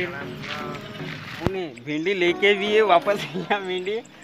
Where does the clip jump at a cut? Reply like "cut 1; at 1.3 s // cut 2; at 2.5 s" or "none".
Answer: cut 1; at 1.4 s